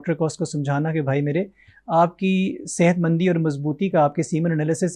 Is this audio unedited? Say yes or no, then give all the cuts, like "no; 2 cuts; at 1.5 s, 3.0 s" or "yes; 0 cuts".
yes; 0 cuts